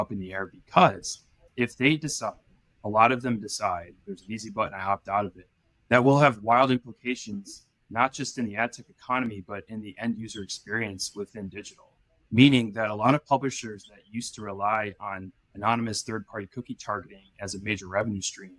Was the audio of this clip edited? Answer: yes; 1 cut; at 1.4 s

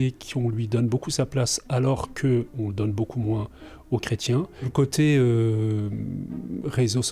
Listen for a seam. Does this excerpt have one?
yes; 1 cut; at 4.7 s

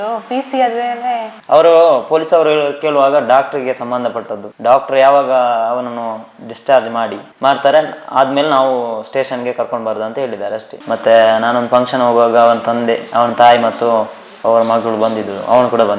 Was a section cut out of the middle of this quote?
yes; 2 cuts; at 1.3 s, 10.7 s

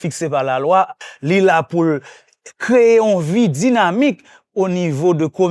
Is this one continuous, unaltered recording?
no; 1 cut; at 1.0 s

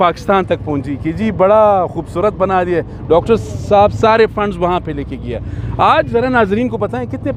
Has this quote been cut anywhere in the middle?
no; 0 cuts

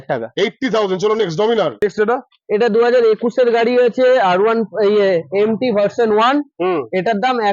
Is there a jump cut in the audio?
yes; 1 cut; at 1.8 s

